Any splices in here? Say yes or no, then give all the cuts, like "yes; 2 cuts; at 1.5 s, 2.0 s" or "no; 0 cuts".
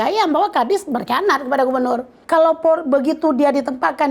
yes; 1 cut; at 2.1 s